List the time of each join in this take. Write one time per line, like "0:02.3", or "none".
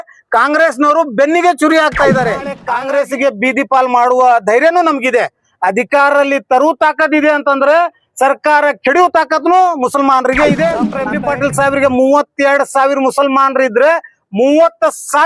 0:02.6
0:11.0